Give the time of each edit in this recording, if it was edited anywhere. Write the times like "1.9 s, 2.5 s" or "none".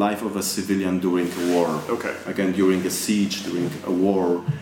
none